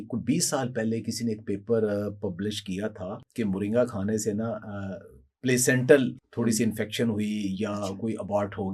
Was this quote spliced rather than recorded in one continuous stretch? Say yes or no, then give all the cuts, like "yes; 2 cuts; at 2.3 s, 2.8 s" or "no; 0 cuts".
yes; 2 cuts; at 3.2 s, 6.2 s